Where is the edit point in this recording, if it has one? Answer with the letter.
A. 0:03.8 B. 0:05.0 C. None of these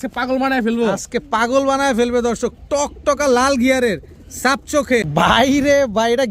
B